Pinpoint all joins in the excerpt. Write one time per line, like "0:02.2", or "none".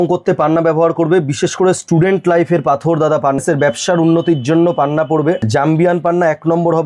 0:03.4
0:05.5